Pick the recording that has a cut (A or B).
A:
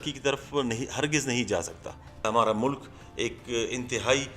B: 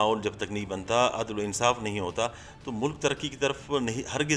A